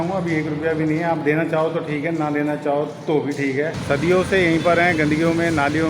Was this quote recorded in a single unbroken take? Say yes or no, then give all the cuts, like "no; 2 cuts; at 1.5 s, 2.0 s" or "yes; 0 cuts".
no; 1 cut; at 3.8 s